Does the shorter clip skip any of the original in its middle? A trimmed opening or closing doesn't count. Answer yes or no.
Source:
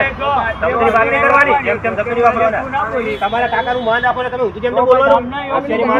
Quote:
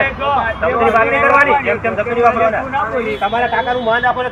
no